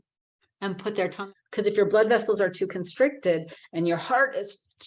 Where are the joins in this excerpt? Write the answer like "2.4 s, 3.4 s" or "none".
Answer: 1.2 s